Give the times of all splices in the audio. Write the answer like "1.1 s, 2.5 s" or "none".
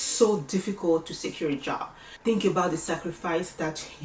2.1 s